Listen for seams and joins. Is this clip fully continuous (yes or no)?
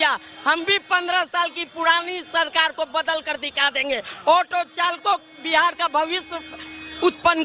yes